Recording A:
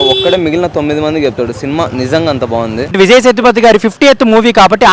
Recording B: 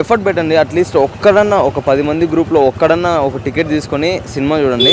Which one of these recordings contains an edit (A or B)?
A